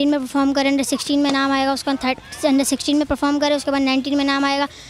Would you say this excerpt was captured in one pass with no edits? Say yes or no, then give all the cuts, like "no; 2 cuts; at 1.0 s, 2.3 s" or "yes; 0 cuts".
yes; 0 cuts